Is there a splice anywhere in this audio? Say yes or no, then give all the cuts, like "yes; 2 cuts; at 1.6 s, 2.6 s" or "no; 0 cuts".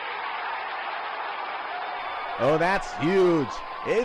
no; 0 cuts